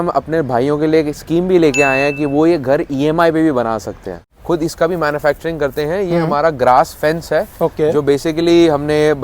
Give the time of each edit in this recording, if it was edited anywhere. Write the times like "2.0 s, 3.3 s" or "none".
4.3 s